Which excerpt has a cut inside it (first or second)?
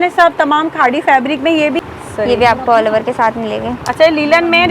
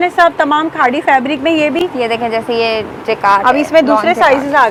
first